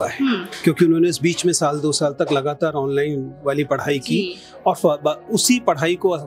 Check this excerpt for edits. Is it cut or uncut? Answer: uncut